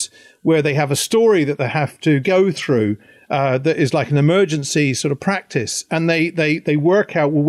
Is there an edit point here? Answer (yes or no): no